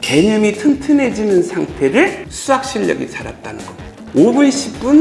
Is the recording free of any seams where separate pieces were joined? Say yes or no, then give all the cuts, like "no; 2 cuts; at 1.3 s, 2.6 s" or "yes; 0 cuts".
no; 1 cut; at 3.9 s